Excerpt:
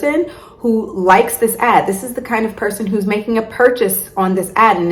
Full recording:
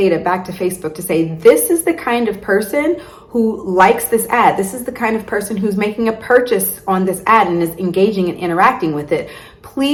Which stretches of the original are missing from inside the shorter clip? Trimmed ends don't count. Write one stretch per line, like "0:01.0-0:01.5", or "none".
none